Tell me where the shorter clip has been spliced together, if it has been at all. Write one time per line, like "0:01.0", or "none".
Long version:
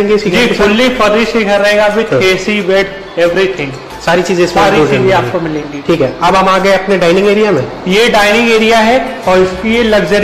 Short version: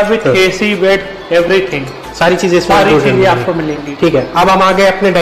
none